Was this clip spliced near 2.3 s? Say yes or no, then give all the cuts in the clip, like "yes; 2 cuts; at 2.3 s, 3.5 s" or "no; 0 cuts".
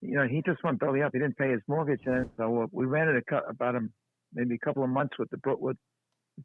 yes; 1 cut; at 2.3 s